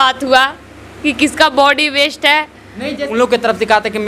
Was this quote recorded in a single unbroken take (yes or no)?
no